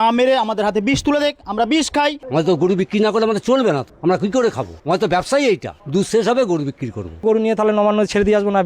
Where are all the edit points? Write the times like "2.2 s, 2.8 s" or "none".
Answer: 2.2 s, 3.9 s, 4.7 s, 5.7 s, 7.2 s